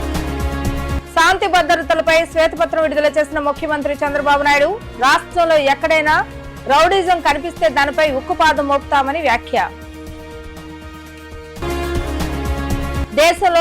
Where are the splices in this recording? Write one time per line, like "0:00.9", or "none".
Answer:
0:01.0